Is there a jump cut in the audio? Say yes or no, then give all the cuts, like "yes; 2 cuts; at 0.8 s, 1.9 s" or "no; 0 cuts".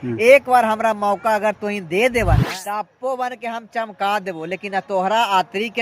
yes; 1 cut; at 2.5 s